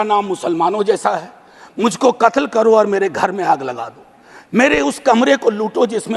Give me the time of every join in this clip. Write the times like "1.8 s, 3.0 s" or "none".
none